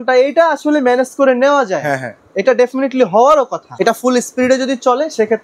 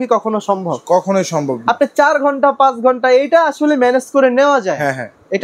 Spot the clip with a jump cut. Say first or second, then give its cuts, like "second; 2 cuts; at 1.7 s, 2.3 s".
first; 1 cut; at 3.7 s